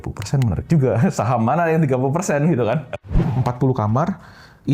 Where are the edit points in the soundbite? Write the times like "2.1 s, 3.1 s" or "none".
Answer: 2.9 s